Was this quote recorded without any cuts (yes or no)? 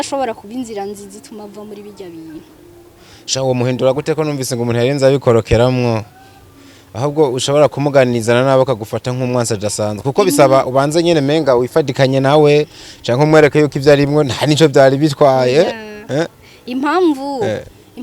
yes